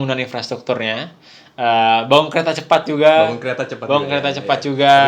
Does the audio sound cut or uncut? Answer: uncut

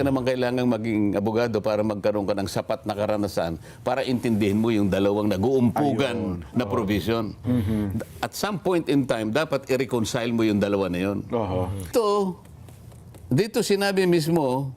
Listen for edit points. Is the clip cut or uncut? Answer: cut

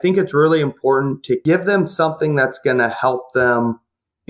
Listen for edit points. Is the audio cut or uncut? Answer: cut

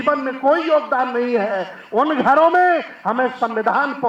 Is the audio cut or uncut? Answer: uncut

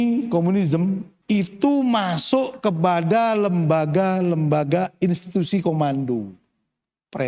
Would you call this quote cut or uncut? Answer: cut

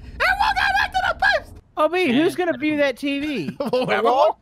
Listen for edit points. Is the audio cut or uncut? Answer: cut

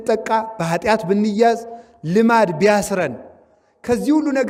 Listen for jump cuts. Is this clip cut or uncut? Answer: uncut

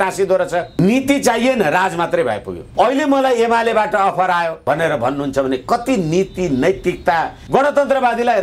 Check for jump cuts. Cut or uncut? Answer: cut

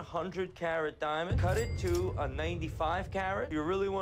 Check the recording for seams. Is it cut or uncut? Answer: uncut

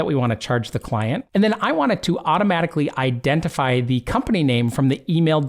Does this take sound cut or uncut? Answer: uncut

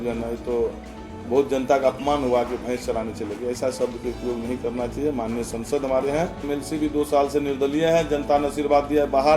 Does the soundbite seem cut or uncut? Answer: cut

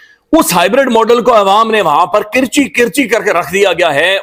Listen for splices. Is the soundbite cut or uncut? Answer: uncut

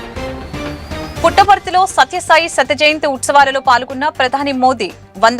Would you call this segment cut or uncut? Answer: uncut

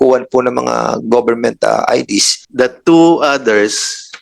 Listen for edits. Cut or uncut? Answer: cut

